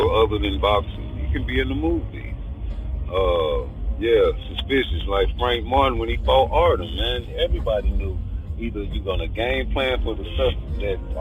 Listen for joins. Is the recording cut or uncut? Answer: uncut